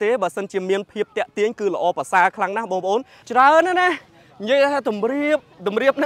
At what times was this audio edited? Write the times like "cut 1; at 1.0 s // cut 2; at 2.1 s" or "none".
cut 1; at 3.2 s